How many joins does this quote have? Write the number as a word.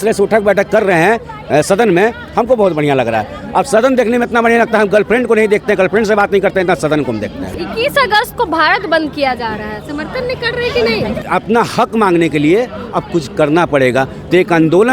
two